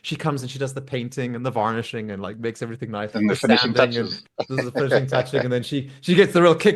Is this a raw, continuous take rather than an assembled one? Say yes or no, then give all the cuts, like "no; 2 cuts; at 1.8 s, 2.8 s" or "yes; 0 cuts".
yes; 0 cuts